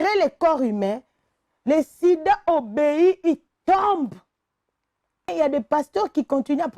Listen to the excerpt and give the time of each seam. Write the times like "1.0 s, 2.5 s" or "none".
5.3 s